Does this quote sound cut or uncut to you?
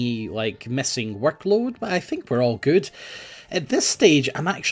cut